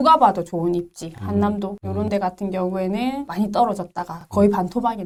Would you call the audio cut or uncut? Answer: uncut